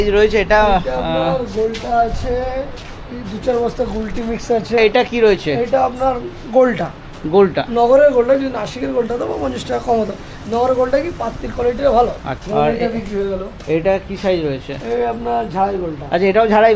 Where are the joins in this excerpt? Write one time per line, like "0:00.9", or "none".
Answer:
0:04.8
0:12.3